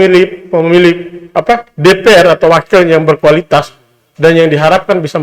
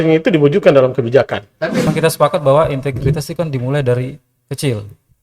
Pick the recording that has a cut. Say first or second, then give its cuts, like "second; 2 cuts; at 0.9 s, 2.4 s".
second; 1 cut; at 1.9 s